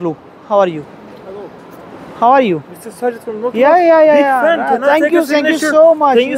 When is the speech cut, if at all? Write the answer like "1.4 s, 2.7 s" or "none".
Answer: none